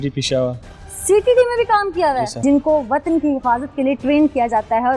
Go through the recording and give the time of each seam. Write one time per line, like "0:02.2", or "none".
0:02.3